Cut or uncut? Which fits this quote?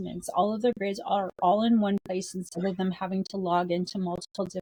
uncut